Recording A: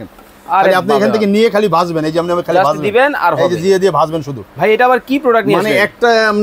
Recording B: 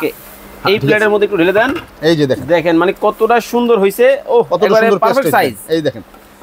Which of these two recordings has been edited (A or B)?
A